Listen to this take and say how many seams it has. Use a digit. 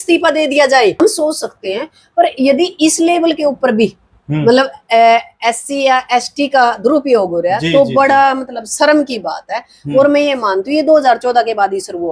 1